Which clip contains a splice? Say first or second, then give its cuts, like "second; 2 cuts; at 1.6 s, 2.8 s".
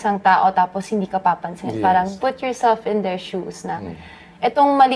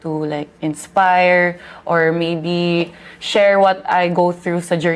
first; 1 cut; at 2.1 s